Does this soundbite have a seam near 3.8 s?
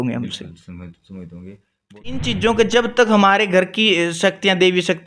no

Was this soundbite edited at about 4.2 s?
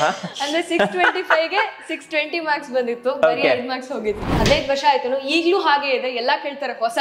yes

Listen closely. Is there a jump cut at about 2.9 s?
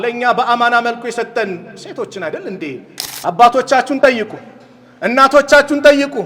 yes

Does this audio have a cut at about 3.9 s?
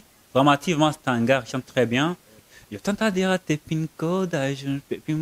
no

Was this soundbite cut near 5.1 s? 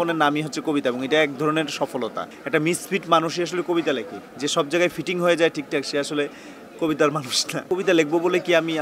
no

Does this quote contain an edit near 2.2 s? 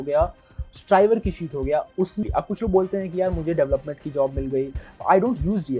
yes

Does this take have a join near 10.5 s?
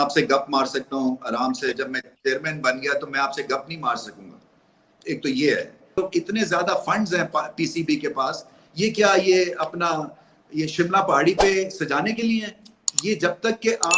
no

